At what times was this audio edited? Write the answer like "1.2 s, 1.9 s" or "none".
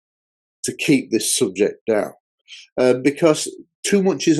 2.3 s